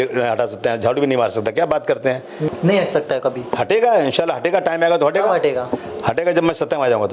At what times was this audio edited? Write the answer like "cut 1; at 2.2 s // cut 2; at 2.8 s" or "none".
cut 1; at 2.5 s